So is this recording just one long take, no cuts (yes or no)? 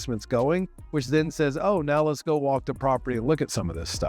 yes